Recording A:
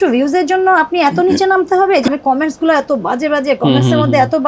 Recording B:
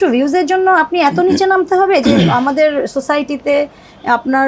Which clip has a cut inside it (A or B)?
A